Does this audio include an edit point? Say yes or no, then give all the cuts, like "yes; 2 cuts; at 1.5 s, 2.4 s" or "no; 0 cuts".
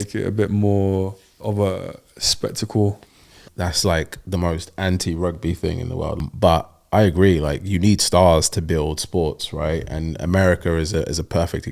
yes; 3 cuts; at 1.3 s, 3.4 s, 6.2 s